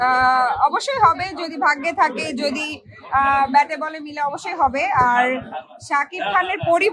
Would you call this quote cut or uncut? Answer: uncut